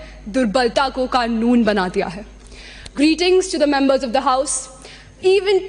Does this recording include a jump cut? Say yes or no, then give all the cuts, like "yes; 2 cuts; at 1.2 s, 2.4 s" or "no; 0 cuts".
no; 0 cuts